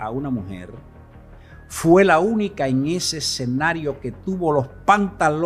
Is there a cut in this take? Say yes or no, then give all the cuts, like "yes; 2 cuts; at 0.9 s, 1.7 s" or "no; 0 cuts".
no; 0 cuts